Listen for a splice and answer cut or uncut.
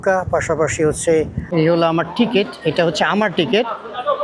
cut